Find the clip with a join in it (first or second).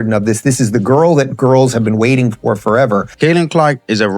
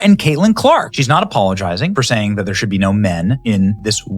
first